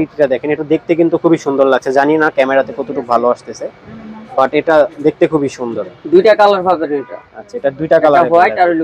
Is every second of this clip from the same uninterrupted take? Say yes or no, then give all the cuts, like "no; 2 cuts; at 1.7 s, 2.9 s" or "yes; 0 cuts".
yes; 0 cuts